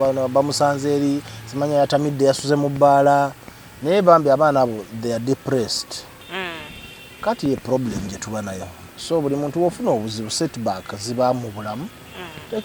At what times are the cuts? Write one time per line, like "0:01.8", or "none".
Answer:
0:06.2